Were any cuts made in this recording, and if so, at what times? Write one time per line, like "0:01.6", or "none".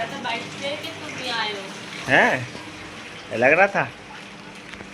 none